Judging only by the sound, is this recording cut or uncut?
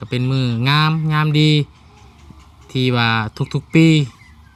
uncut